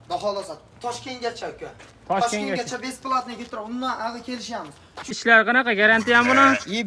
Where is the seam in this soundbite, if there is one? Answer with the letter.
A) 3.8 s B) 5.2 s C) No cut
B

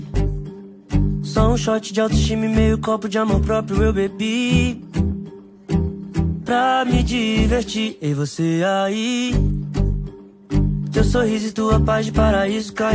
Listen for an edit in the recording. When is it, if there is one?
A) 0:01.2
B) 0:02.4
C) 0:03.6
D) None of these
C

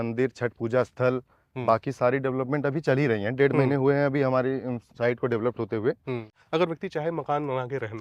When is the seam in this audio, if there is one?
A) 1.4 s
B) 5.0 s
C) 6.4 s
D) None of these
C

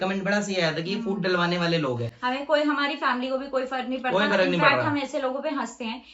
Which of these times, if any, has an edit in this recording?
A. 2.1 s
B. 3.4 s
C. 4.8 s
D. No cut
D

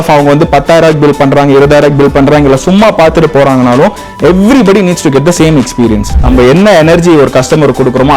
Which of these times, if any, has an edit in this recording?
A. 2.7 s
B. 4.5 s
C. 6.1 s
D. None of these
C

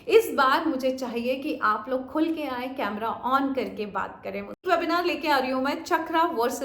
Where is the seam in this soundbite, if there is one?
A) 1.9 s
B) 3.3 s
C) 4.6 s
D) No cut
C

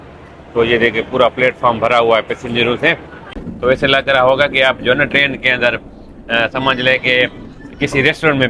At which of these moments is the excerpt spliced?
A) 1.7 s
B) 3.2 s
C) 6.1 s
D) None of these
B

